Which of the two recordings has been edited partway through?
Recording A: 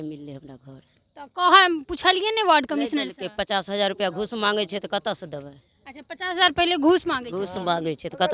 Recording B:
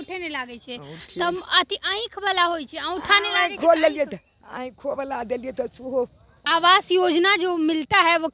B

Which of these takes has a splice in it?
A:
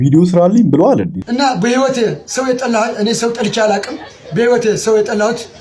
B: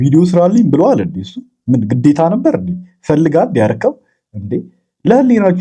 A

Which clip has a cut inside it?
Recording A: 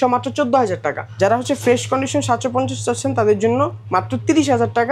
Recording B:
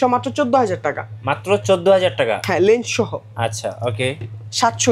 A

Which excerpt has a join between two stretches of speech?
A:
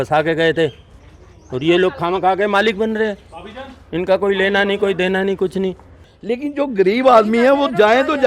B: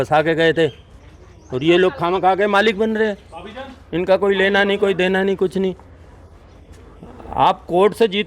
A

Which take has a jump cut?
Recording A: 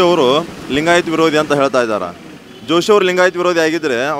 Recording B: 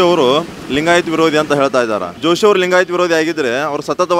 B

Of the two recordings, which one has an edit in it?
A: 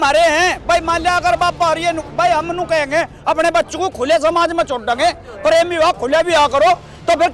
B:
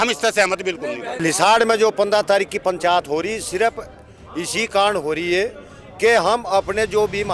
B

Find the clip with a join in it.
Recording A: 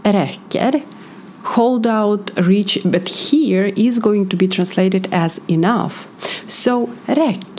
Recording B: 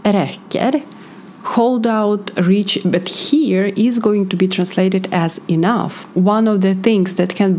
B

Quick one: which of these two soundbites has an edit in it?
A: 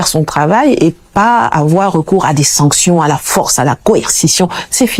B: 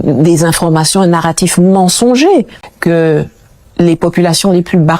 B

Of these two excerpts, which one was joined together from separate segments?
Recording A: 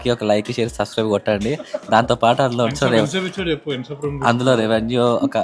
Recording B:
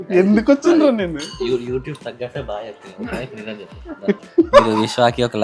B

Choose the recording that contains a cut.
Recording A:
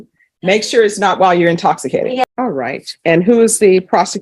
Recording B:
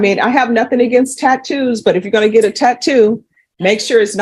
A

